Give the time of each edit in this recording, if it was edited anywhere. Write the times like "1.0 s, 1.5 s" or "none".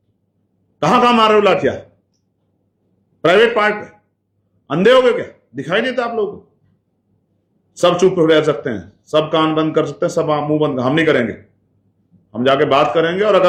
none